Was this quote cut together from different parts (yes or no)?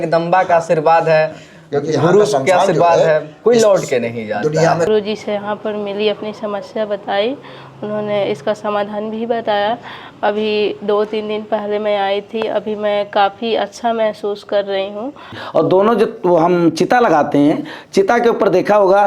yes